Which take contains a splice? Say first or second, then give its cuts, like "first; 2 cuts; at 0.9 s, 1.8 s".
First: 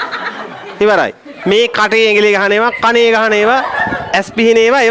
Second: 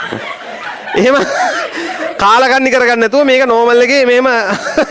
first; 1 cut; at 1.3 s